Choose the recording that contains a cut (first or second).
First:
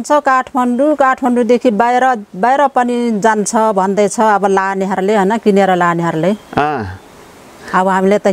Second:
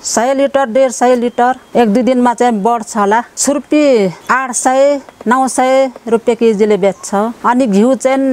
second